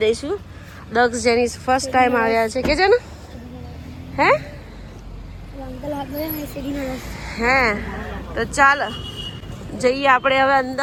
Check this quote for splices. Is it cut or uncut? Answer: uncut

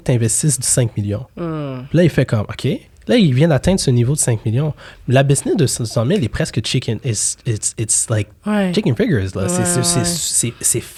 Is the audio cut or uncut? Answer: uncut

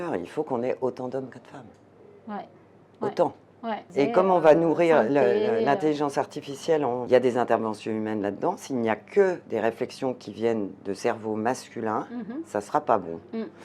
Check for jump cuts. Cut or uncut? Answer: cut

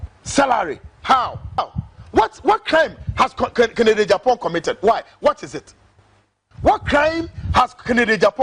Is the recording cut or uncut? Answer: cut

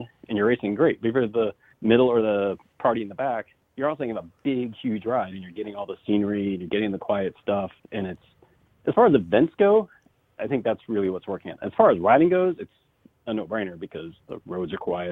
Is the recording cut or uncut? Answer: cut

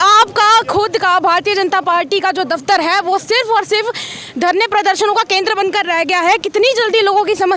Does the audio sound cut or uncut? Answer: uncut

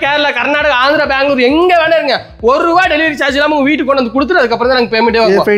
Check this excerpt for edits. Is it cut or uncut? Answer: uncut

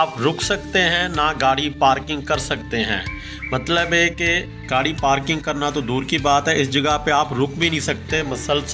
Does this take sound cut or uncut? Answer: uncut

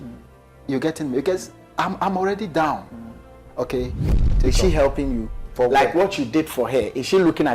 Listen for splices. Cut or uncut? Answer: cut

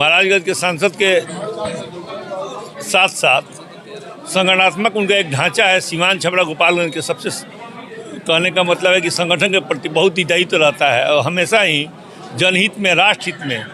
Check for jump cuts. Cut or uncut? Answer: uncut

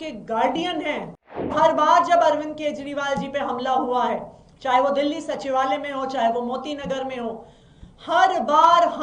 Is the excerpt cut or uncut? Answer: cut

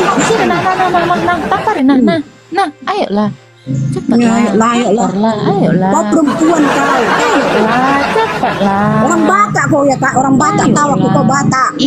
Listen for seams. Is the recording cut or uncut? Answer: uncut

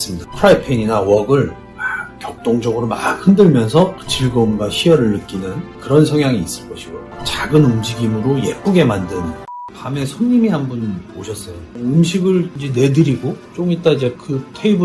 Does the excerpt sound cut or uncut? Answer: cut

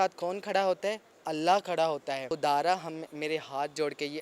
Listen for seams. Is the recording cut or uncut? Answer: cut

